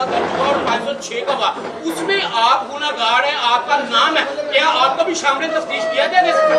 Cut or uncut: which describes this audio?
uncut